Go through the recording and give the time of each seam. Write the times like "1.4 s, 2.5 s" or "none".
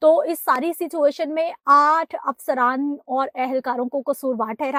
none